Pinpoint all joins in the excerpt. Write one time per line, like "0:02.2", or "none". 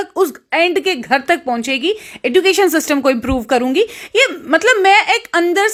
none